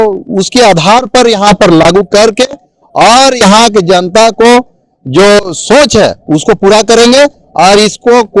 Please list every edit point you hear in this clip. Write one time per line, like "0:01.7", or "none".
none